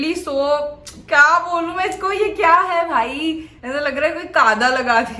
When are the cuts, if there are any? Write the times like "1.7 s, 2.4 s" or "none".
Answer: none